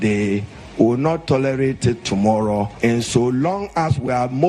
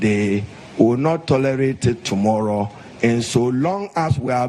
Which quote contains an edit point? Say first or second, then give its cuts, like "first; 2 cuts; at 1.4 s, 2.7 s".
first; 1 cut; at 2.7 s